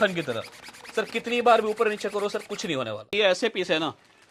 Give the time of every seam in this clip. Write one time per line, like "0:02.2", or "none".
0:03.1